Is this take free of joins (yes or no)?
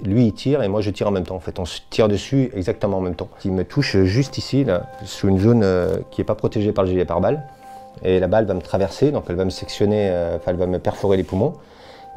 yes